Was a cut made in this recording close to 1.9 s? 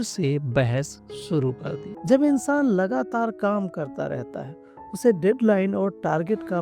yes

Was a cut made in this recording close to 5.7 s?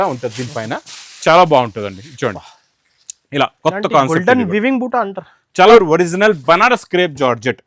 yes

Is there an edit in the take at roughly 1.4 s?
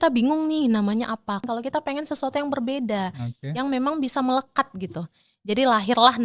yes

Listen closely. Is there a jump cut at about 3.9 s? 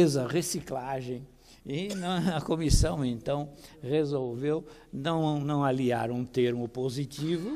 yes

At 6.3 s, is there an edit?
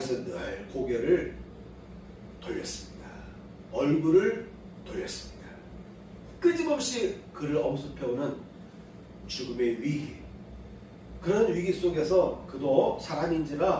yes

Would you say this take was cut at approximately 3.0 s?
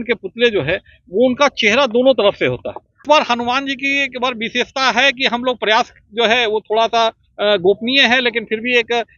yes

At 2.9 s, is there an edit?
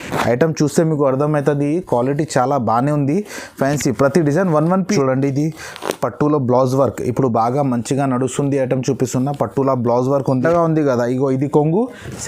no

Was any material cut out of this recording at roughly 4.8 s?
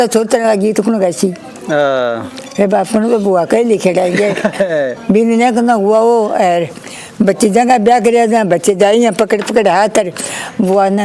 no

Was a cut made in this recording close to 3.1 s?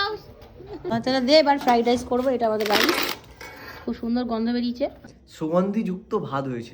no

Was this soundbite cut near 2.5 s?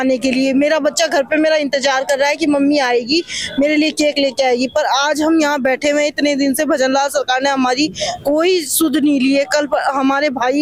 no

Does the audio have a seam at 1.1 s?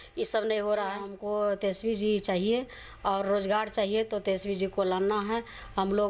yes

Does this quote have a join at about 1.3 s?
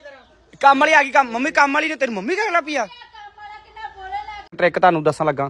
no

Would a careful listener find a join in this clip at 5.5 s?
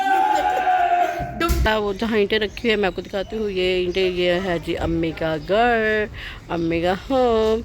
no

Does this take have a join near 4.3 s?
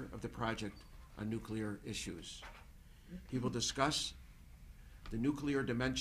no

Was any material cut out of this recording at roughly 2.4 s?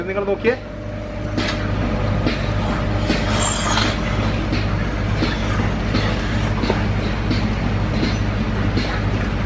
no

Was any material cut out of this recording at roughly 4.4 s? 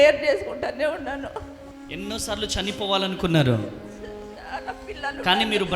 no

